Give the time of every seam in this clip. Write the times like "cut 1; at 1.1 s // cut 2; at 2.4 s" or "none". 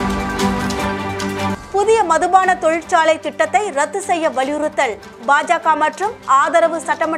cut 1; at 1.6 s